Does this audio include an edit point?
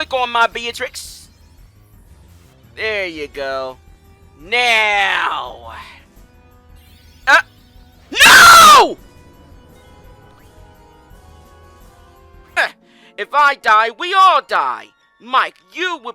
yes; 1 cut; at 12.6 s

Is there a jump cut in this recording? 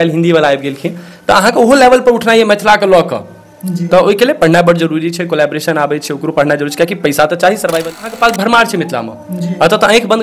yes; 1 cut; at 8.1 s

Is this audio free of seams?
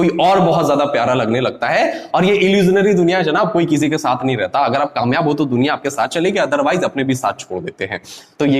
yes; 0 cuts

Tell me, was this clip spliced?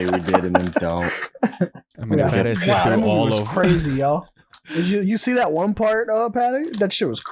yes; 1 cut; at 1.9 s

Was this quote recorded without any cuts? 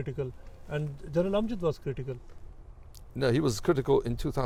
yes; 0 cuts

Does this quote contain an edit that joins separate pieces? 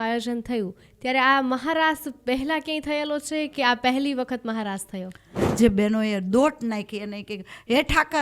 yes; 1 cut; at 5.4 s

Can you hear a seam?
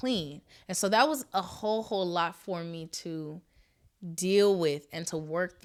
no; 0 cuts

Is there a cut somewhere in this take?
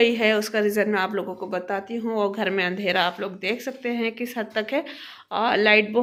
no; 0 cuts

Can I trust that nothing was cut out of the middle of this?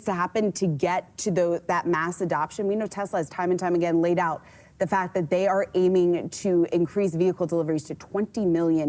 yes; 0 cuts

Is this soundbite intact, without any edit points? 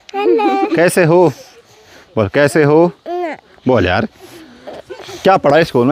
yes; 0 cuts

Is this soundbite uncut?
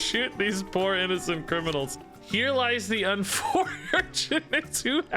no; 1 cut; at 1.9 s

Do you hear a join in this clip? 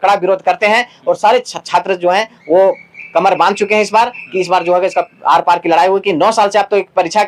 no; 0 cuts

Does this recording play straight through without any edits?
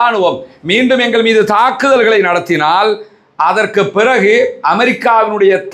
yes; 0 cuts

